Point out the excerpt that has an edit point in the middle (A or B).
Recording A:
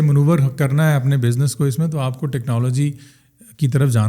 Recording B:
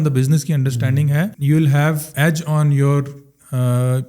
B